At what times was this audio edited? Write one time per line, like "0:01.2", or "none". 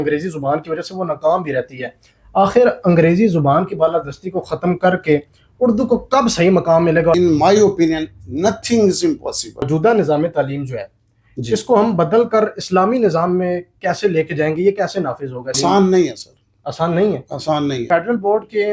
0:07.1
0:09.7
0:15.6
0:17.8